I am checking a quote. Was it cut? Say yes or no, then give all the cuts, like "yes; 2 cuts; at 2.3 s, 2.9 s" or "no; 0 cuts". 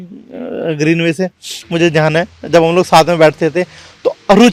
no; 0 cuts